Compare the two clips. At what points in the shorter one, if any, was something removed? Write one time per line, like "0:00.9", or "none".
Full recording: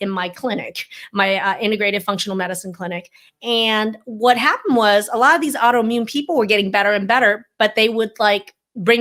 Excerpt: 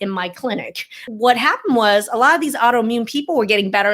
0:01.0